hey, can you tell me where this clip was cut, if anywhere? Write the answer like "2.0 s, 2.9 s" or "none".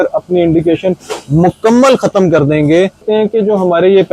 3.0 s